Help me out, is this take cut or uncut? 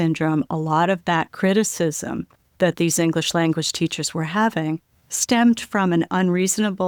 uncut